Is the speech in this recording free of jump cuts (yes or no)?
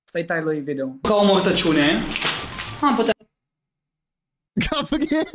no